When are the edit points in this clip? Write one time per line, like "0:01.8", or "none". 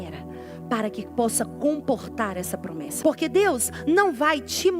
0:02.8